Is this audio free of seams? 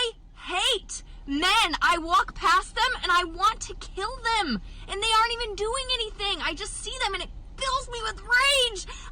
no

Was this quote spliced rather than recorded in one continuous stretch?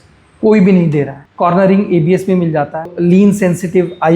yes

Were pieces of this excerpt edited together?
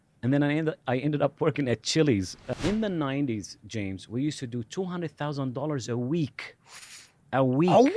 yes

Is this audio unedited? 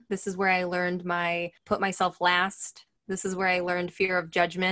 no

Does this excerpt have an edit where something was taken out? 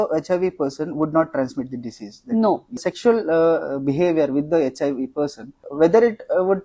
yes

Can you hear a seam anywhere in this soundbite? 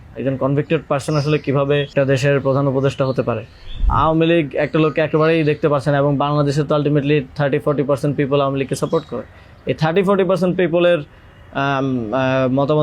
yes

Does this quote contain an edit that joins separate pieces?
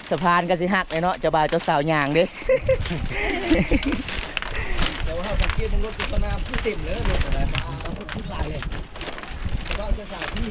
no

